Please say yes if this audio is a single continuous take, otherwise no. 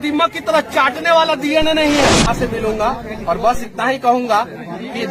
no